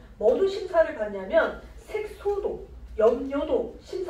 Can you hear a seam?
no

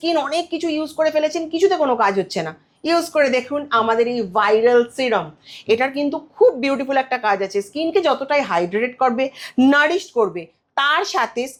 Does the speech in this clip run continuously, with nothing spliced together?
yes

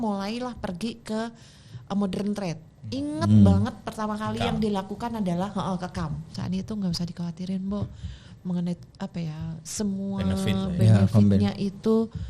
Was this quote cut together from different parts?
yes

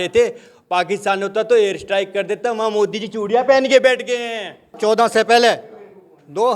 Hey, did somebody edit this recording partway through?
yes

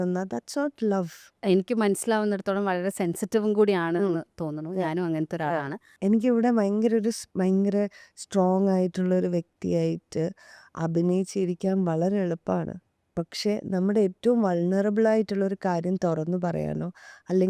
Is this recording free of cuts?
no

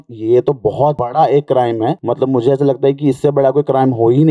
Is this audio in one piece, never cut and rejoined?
no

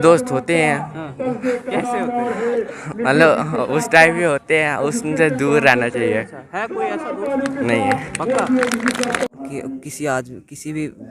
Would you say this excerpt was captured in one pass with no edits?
yes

